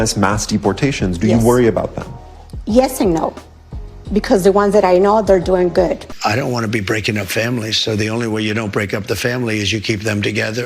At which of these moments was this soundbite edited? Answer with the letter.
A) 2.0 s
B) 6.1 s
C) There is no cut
B